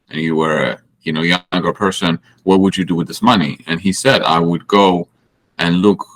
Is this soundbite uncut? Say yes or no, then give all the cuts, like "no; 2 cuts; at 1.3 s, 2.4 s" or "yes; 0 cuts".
yes; 0 cuts